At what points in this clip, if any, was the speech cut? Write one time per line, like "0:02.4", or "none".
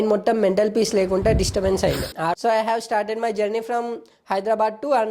0:02.3